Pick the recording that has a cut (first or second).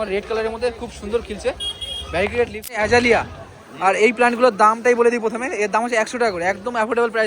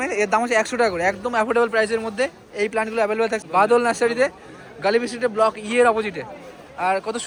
first